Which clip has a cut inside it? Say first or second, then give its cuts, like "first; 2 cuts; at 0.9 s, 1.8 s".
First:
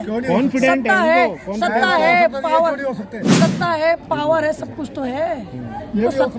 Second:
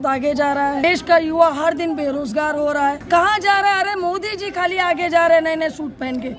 second; 2 cuts; at 0.8 s, 3.0 s